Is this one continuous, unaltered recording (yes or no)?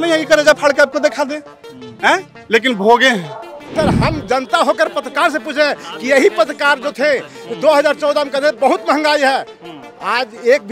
no